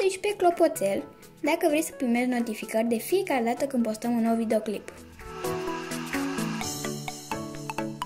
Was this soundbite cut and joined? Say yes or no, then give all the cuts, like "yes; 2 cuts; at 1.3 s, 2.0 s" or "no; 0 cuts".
yes; 1 cut; at 5.2 s